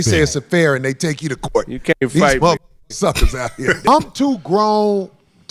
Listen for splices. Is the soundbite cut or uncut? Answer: cut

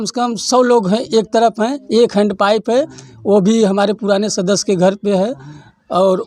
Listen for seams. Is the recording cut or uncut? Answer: uncut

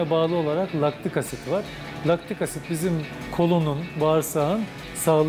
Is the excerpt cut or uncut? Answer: uncut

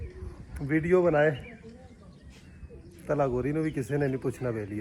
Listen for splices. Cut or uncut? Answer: uncut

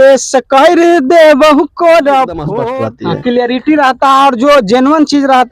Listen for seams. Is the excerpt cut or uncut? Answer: cut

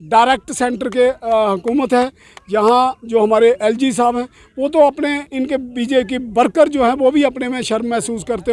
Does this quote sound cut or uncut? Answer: uncut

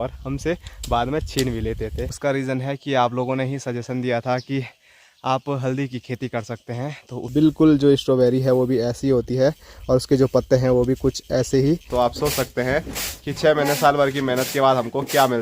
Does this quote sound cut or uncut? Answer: cut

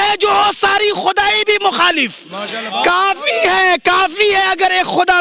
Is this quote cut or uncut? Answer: uncut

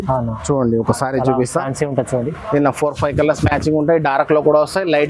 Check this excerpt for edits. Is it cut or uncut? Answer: uncut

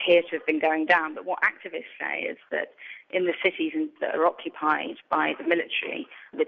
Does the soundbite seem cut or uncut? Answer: cut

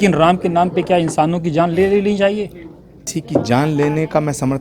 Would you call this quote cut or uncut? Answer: cut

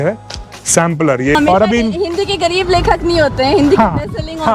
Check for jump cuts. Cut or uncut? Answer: cut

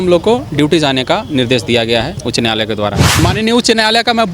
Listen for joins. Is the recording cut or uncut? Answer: cut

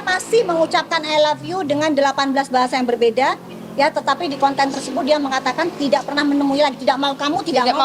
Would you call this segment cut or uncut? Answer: uncut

